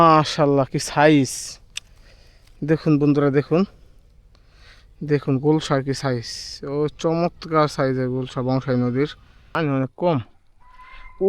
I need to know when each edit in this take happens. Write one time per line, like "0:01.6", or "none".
0:09.5